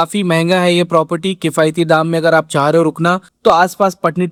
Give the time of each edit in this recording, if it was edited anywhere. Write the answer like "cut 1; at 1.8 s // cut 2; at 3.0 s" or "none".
none